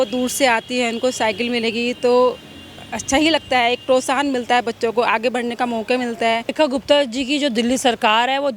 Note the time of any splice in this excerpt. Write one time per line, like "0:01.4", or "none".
0:06.5